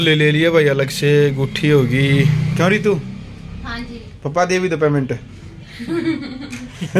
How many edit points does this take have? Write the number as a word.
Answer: zero